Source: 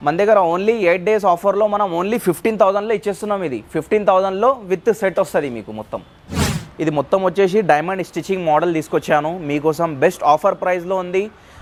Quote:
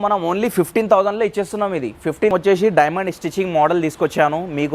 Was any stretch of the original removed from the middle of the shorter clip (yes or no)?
yes